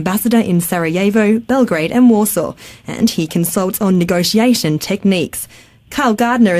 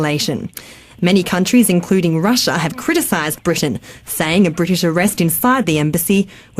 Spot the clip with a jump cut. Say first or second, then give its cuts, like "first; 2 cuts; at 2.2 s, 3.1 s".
first; 1 cut; at 3.8 s